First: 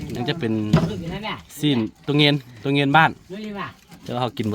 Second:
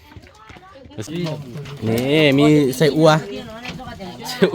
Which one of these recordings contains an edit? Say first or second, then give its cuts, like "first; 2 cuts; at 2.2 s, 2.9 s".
second; 1 cut; at 1.1 s